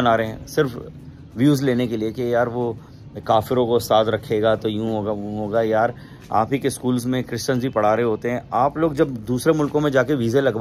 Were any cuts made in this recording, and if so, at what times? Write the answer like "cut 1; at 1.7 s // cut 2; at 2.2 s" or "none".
none